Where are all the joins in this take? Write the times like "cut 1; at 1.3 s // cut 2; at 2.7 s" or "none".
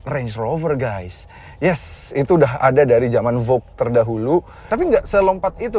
cut 1; at 4.6 s